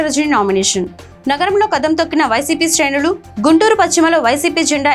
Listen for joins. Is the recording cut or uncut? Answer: uncut